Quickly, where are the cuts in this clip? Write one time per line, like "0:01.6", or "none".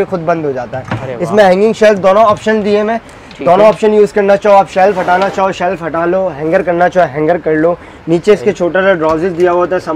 none